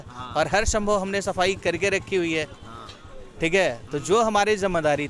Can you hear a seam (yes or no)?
no